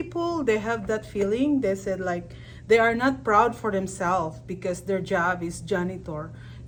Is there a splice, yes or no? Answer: no